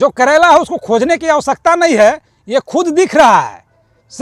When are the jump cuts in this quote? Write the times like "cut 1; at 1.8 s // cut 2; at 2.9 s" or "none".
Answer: none